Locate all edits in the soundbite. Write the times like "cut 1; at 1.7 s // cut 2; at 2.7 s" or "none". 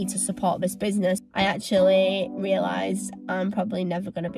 cut 1; at 1.3 s